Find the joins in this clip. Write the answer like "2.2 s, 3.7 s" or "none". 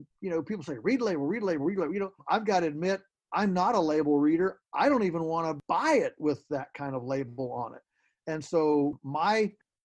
none

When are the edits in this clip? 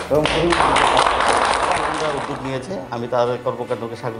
2.2 s

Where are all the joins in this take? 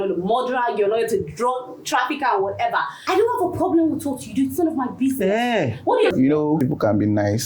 3.0 s, 6.2 s

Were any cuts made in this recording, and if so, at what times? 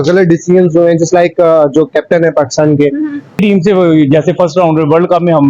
3.4 s

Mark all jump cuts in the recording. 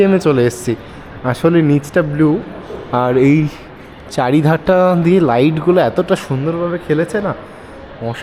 none

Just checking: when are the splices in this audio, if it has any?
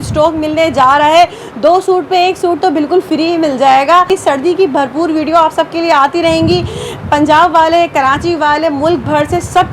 4.1 s

